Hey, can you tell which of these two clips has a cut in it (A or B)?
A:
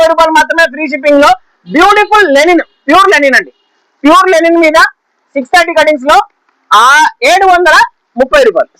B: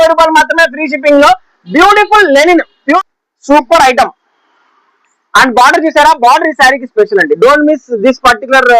B